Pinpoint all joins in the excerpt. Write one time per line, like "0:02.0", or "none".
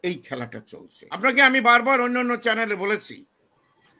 0:01.0